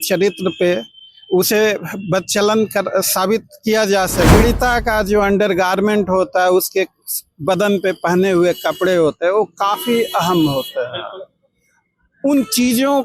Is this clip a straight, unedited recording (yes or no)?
no